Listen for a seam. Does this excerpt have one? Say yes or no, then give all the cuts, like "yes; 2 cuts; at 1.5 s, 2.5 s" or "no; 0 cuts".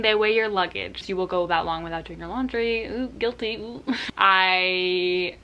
yes; 2 cuts; at 1.0 s, 4.1 s